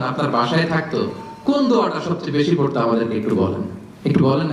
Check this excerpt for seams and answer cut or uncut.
uncut